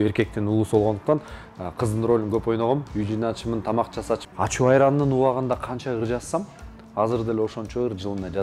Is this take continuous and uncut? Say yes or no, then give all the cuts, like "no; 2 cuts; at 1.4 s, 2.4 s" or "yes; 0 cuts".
no; 1 cut; at 4.2 s